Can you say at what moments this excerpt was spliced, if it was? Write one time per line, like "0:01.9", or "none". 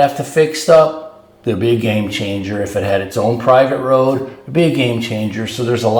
none